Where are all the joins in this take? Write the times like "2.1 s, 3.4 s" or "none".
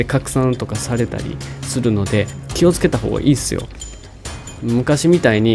2.4 s